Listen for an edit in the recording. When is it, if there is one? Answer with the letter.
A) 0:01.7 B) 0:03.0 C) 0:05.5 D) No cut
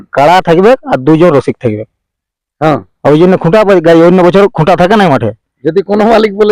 D